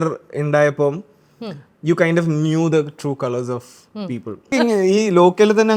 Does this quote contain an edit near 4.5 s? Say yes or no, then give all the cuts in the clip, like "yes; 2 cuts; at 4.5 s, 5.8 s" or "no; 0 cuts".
yes; 1 cut; at 4.5 s